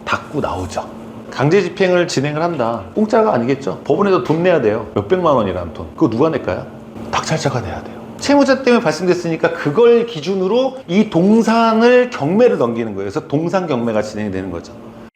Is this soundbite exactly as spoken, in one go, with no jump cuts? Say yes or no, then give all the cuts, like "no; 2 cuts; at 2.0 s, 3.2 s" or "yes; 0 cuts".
no; 6 cuts; at 2.8 s, 3.7 s, 4.9 s, 5.8 s, 8.1 s, 10.8 s